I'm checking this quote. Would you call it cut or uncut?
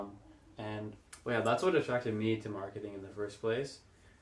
cut